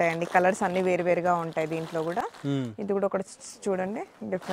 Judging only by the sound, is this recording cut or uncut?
uncut